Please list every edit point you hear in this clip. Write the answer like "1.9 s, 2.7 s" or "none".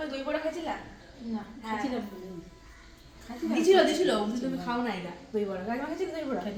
none